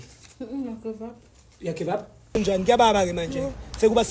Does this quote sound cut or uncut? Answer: cut